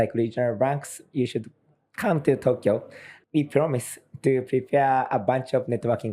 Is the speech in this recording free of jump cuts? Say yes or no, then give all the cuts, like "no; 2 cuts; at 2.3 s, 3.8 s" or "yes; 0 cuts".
no; 1 cut; at 3.1 s